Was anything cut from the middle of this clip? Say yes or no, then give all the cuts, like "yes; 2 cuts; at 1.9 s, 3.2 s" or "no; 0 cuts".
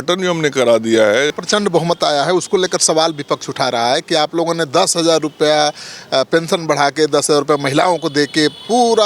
yes; 1 cut; at 1.3 s